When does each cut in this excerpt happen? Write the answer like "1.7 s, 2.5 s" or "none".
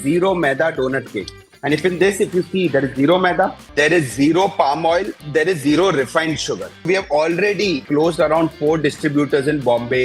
3.6 s, 5.2 s, 6.9 s, 7.8 s